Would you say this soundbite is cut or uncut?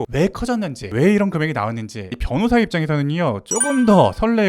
cut